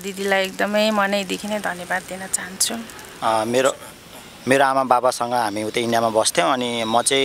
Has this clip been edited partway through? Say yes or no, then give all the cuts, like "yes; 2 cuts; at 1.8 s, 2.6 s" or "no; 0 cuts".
yes; 1 cut; at 3.0 s